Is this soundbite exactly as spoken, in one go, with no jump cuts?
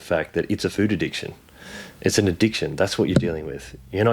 yes; 0 cuts

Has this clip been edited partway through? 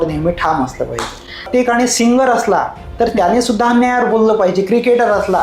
yes; 1 cut; at 1.5 s

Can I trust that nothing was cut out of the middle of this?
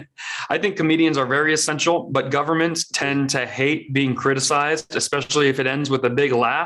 yes; 0 cuts

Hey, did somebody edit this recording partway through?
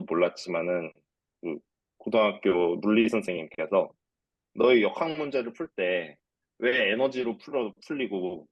no; 0 cuts

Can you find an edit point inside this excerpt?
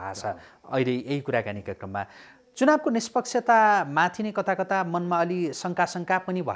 no; 0 cuts

